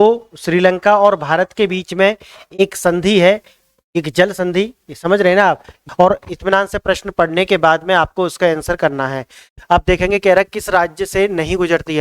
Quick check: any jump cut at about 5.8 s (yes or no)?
yes